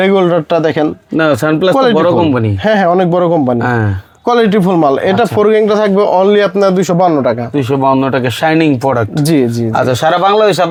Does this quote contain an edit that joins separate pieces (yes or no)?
no